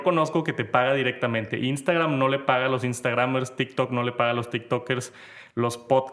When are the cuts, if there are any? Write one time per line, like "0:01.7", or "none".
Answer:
none